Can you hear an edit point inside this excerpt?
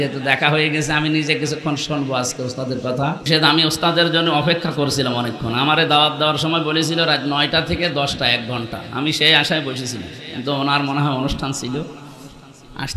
yes; 1 cut; at 3.2 s

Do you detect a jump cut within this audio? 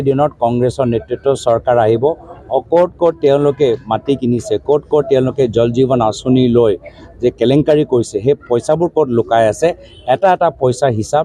no; 0 cuts

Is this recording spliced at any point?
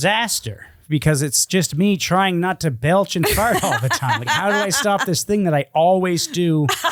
no; 0 cuts

